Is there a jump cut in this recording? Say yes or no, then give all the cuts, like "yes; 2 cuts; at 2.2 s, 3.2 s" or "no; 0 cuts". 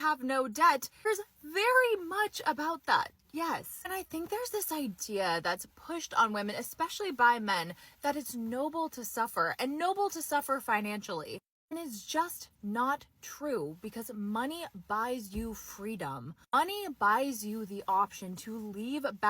yes; 1 cut; at 11.9 s